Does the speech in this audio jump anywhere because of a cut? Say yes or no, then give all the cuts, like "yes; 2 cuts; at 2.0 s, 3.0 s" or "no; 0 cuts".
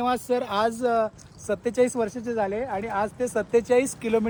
no; 0 cuts